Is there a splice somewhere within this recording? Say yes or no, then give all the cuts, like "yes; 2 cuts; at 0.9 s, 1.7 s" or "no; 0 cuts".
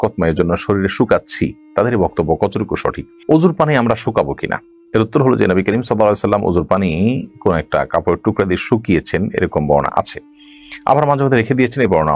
no; 0 cuts